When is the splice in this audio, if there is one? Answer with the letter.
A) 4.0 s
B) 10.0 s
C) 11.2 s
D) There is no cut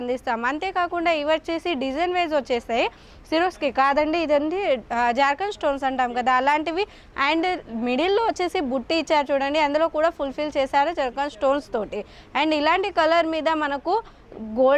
D